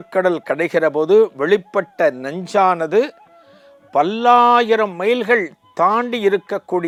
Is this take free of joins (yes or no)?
yes